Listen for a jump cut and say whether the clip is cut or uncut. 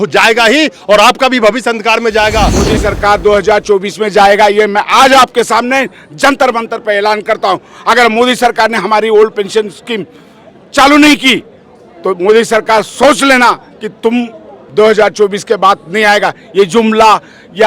cut